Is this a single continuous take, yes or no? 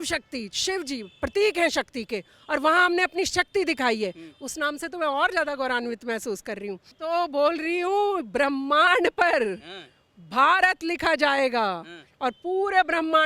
no